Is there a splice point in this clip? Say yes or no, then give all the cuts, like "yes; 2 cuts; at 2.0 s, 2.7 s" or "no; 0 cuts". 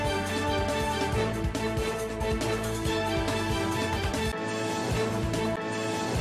yes; 1 cut; at 3.2 s